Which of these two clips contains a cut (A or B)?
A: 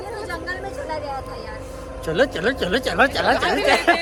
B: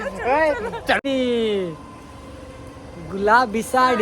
B